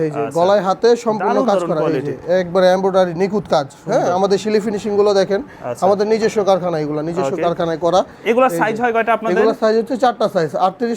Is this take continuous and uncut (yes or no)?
yes